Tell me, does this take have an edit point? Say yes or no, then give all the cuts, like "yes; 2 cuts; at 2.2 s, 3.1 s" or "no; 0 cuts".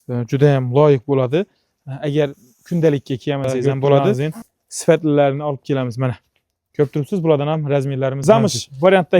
yes; 2 cuts; at 4.2 s, 8.2 s